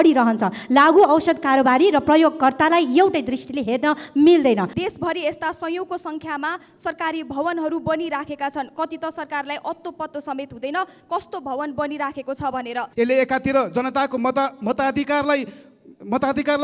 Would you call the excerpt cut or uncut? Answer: cut